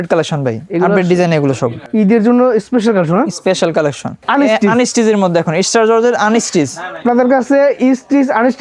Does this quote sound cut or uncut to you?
cut